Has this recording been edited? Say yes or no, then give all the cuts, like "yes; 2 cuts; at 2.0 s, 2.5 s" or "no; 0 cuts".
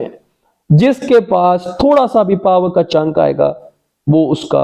no; 0 cuts